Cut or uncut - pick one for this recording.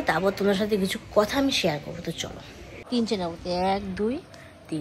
cut